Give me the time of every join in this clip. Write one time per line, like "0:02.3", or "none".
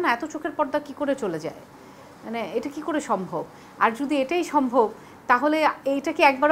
none